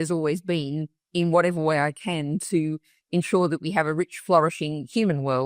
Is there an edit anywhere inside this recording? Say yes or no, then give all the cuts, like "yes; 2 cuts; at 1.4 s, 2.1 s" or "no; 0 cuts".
no; 0 cuts